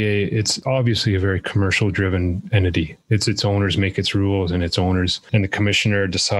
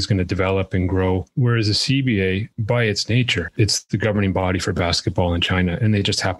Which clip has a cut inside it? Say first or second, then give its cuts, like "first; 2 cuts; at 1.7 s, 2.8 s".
second; 3 cuts; at 1.3 s, 2.5 s, 3.5 s